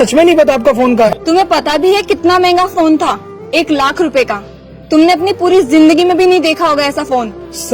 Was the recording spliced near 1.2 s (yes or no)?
yes